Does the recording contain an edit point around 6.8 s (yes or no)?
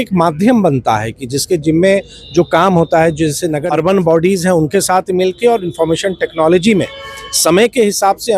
no